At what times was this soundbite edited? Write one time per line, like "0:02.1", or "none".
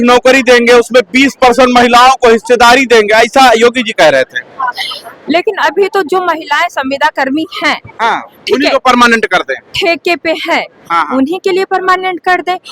none